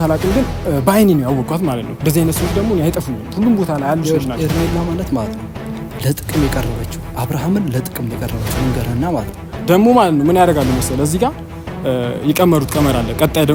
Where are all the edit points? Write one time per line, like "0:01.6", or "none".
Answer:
none